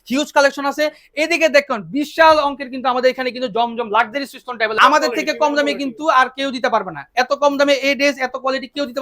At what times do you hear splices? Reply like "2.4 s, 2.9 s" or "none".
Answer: 4.7 s

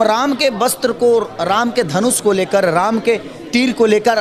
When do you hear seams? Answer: none

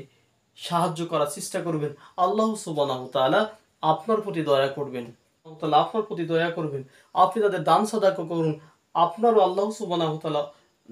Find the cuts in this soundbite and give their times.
5.5 s

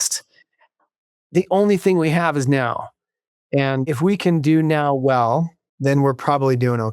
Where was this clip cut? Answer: 3.9 s, 5.6 s

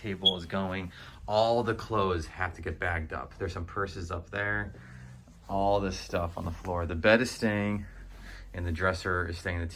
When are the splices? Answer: none

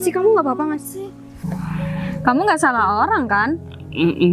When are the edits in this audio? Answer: 1.3 s

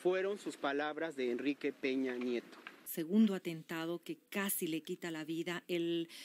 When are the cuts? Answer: 2.8 s

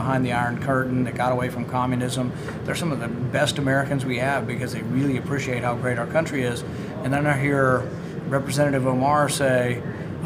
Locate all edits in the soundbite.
none

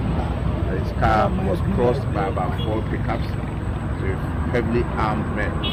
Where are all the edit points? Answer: none

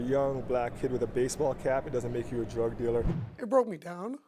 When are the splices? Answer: 3.2 s

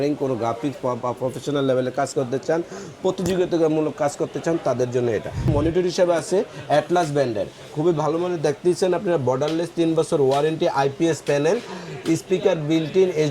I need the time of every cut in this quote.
5.5 s

